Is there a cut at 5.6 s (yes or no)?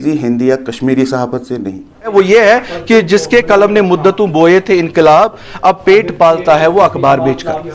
no